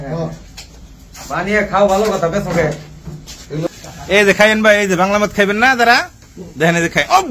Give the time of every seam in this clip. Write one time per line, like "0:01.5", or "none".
0:03.7